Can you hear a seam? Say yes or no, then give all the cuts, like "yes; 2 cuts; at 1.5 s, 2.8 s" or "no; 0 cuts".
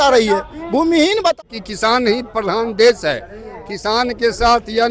yes; 1 cut; at 1.4 s